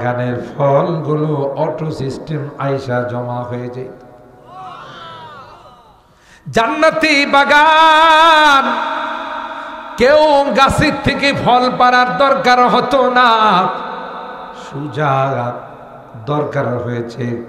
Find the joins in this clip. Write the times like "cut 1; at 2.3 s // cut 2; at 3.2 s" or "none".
none